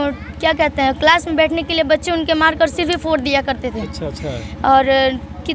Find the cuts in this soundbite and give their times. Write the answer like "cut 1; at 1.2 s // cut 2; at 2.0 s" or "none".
none